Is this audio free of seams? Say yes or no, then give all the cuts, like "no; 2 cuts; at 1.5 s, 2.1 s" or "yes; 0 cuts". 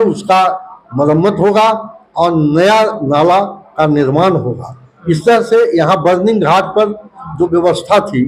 yes; 0 cuts